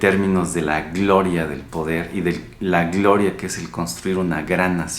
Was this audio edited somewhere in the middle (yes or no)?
no